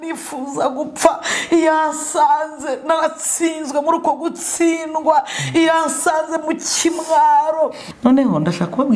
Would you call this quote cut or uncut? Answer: cut